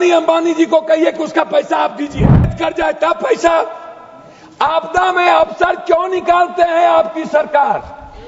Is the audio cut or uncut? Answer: cut